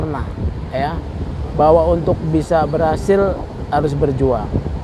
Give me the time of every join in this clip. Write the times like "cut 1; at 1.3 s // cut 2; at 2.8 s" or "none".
none